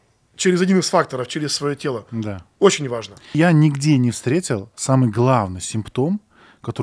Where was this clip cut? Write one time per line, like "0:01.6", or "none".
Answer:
0:03.3